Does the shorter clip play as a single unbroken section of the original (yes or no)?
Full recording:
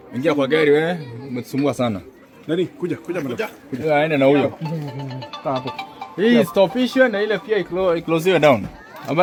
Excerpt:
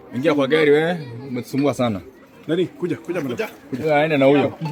yes